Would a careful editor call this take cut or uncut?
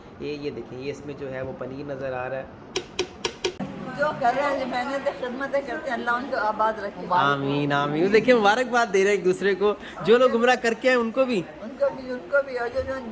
cut